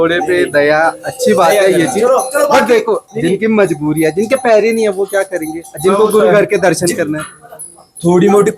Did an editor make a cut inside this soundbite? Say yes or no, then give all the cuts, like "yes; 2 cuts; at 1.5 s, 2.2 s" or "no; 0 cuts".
no; 0 cuts